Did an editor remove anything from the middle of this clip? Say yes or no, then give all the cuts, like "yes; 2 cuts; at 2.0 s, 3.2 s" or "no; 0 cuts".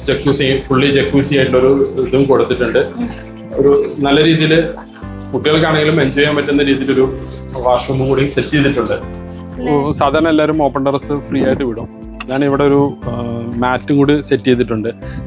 yes; 1 cut; at 9.6 s